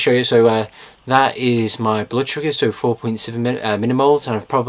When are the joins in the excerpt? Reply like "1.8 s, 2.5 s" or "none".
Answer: none